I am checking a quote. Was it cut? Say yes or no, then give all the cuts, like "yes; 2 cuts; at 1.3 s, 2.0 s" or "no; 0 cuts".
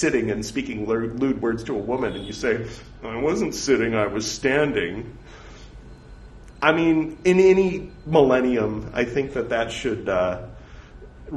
no; 0 cuts